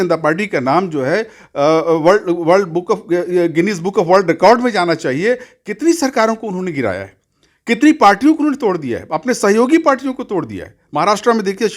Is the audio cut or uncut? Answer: uncut